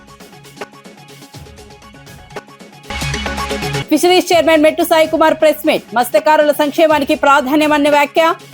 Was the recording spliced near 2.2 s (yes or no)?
yes